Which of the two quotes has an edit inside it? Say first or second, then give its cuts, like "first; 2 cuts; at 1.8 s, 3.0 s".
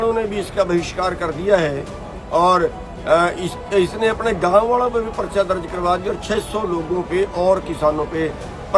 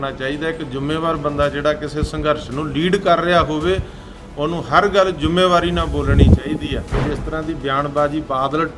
second; 1 cut; at 7.0 s